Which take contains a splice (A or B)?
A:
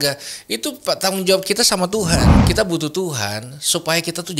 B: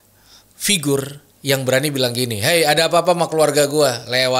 A